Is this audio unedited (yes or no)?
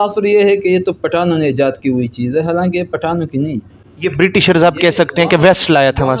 yes